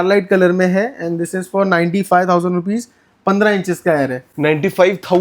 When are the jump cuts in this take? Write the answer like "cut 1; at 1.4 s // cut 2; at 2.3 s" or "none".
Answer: none